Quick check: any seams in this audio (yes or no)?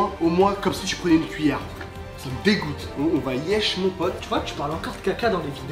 yes